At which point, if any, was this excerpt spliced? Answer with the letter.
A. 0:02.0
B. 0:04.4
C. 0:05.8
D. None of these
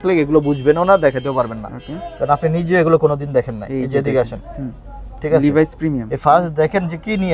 D